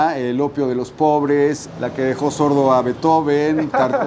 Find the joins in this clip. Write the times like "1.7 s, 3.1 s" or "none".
1.6 s